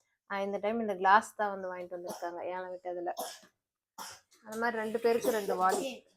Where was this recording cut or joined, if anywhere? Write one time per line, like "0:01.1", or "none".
none